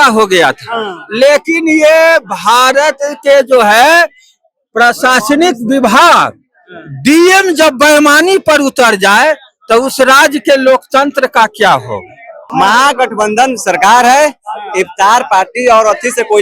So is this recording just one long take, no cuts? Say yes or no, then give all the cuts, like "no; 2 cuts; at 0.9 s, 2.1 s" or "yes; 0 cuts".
no; 1 cut; at 12.4 s